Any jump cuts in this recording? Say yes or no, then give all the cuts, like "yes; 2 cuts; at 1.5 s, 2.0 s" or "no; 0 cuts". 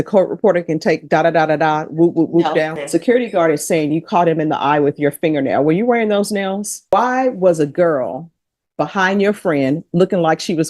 yes; 2 cuts; at 2.8 s, 6.8 s